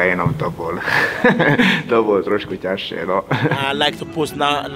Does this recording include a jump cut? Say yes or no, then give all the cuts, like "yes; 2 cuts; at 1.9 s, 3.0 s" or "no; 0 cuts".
yes; 1 cut; at 3.6 s